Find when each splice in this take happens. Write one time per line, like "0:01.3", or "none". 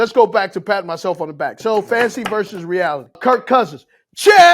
0:03.2